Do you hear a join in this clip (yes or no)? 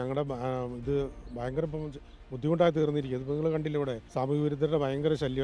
yes